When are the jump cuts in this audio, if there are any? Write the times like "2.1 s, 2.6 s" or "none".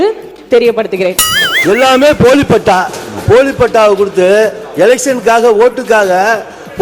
1.4 s